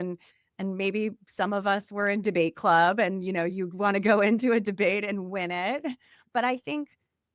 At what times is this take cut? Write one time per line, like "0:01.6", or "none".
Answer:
0:06.2